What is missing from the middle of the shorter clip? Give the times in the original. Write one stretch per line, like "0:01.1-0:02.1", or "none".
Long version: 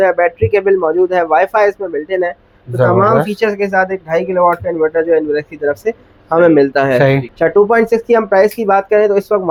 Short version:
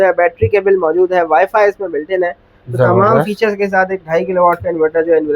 none